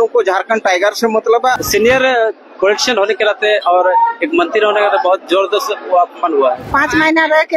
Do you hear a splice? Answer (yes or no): yes